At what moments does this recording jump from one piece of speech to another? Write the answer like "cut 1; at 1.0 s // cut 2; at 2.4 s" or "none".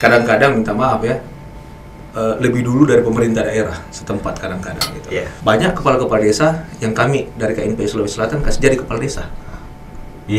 cut 1; at 5.3 s